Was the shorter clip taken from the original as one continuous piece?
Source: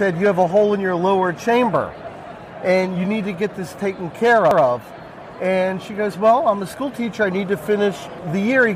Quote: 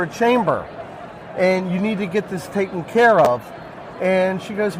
no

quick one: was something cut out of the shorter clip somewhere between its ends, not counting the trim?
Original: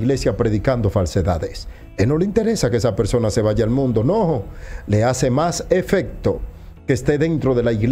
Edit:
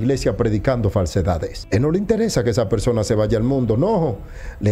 yes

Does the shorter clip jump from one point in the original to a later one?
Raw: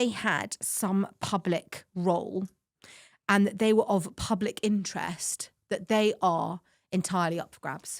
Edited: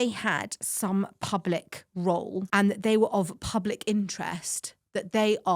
yes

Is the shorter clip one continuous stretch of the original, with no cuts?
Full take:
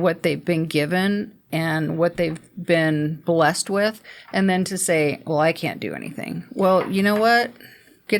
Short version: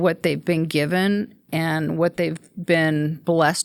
yes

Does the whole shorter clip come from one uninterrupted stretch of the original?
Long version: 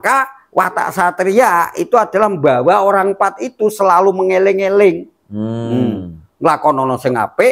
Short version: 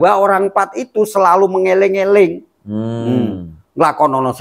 yes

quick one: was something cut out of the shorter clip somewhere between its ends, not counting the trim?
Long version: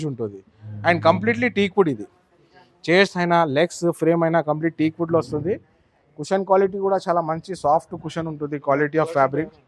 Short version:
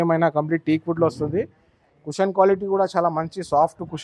no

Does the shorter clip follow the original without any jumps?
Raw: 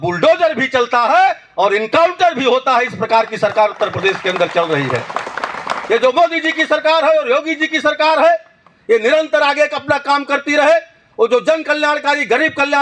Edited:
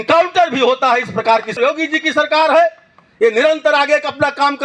no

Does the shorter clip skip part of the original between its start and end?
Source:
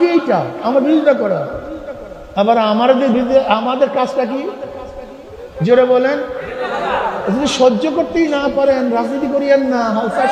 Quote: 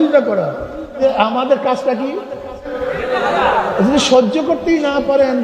yes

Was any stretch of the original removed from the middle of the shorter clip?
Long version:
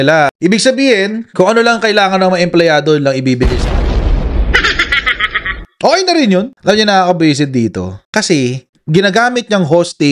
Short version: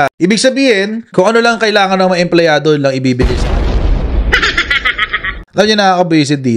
yes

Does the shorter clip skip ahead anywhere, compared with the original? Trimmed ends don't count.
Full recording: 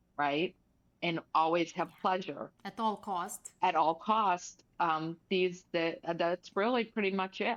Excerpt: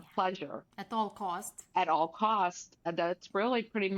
yes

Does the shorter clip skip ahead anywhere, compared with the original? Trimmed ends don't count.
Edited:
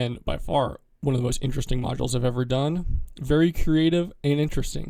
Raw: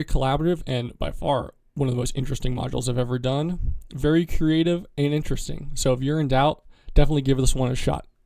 no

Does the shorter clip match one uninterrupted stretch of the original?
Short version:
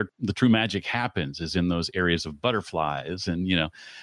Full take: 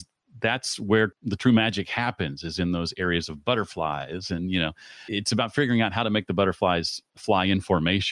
yes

